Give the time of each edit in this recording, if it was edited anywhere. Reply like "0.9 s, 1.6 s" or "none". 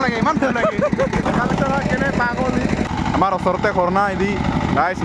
1.2 s, 2.9 s